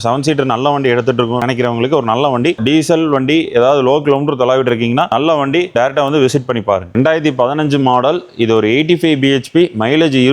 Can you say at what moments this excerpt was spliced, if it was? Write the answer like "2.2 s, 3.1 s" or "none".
2.6 s, 6.9 s